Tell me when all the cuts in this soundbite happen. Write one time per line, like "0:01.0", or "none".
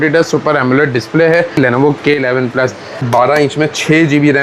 0:01.6
0:03.0